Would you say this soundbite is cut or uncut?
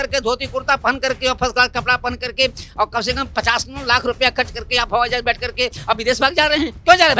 uncut